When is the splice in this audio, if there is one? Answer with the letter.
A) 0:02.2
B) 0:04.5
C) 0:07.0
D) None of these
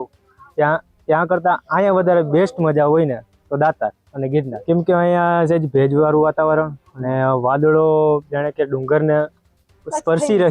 B